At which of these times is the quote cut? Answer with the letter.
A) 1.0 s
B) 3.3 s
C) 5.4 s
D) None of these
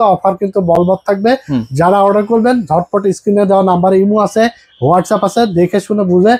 D